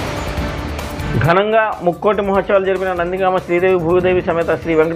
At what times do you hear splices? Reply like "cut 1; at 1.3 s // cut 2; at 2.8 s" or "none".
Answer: cut 1; at 1.1 s